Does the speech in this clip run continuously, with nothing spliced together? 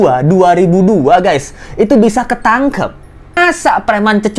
no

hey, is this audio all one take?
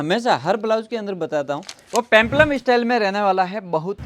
no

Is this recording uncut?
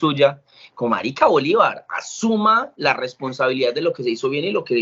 yes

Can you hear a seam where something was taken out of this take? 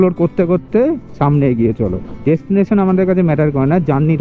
yes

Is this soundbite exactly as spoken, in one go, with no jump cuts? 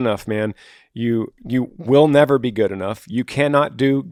yes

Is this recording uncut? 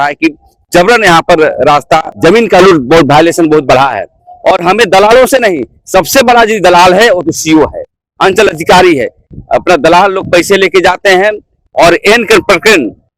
no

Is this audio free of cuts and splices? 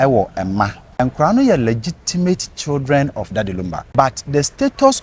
no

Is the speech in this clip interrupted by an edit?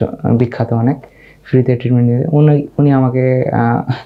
no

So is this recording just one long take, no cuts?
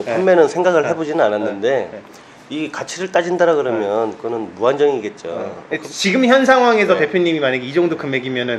yes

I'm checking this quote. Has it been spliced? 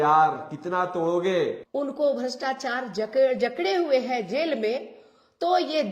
yes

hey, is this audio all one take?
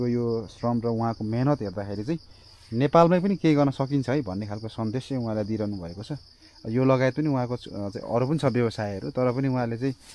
yes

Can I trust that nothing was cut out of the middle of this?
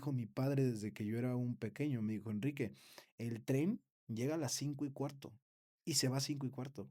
yes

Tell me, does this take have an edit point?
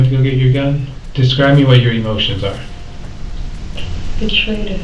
yes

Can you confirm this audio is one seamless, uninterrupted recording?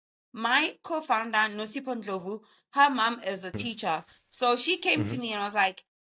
yes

